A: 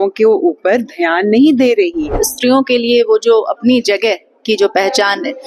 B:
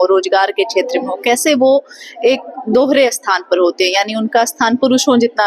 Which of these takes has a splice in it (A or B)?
A